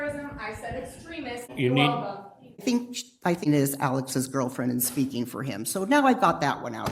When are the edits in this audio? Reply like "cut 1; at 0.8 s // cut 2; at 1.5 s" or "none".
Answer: cut 1; at 1.5 s // cut 2; at 2.6 s // cut 3; at 3.5 s